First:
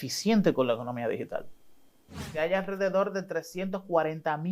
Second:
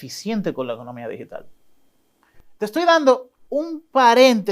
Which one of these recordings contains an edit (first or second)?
first